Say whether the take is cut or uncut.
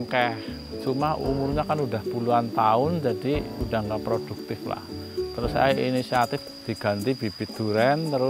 cut